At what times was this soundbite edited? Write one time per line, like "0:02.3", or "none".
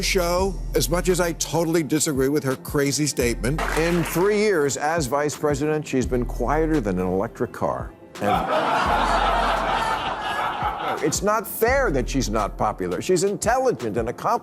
0:03.6